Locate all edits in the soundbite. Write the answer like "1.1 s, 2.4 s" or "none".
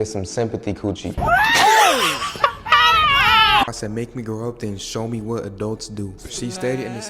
3.8 s